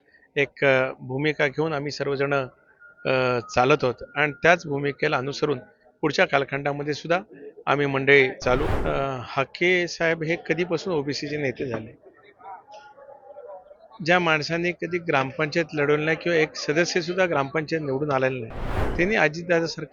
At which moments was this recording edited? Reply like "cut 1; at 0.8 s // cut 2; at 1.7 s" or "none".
cut 1; at 8.7 s